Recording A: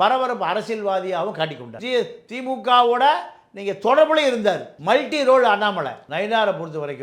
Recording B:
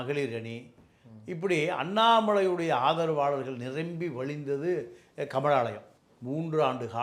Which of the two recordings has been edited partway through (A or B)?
A